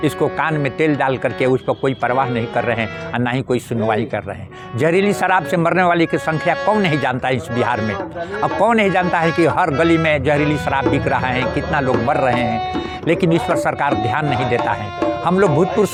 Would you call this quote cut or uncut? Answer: uncut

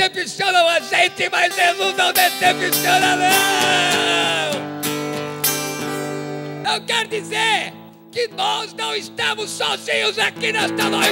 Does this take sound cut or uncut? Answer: cut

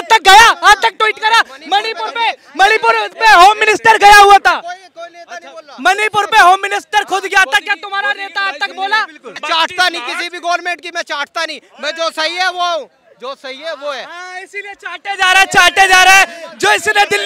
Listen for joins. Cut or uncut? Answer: cut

